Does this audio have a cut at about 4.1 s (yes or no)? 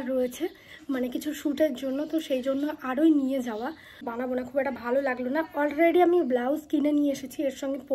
yes